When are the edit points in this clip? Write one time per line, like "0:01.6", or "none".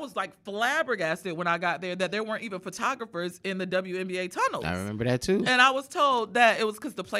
0:04.6